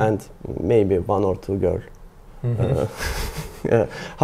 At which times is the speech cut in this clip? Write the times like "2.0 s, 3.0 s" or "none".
none